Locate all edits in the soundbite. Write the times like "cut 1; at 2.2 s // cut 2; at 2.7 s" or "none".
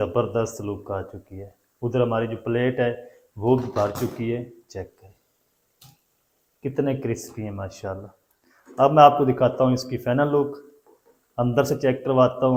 none